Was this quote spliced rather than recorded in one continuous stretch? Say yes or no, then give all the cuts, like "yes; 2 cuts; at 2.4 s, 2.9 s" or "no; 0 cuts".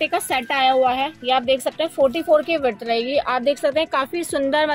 no; 0 cuts